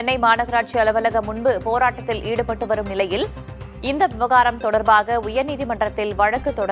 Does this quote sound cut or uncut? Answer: uncut